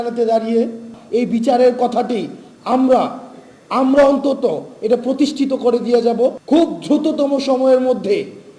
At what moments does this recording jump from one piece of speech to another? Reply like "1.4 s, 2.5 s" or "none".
0.9 s, 6.4 s